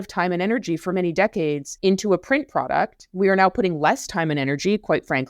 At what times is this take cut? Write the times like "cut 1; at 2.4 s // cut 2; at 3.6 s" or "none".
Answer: cut 1; at 1.7 s // cut 2; at 3.0 s